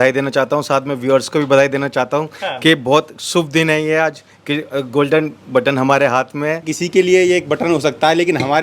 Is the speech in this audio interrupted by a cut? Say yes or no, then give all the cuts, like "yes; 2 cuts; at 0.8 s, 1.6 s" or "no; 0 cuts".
yes; 1 cut; at 6.7 s